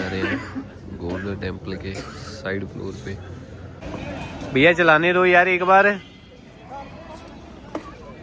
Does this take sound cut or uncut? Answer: cut